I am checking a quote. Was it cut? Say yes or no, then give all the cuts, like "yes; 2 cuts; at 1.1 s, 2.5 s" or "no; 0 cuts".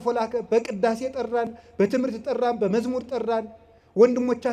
no; 0 cuts